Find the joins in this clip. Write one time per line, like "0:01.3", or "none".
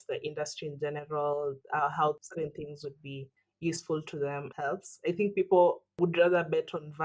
0:02.2
0:04.5
0:06.0